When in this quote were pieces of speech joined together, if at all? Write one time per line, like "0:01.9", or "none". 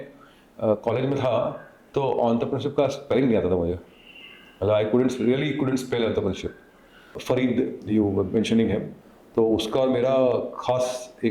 0:07.1